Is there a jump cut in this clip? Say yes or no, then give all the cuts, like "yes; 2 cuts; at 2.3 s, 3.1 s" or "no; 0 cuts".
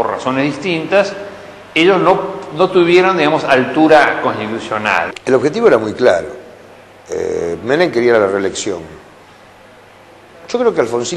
yes; 1 cut; at 5.1 s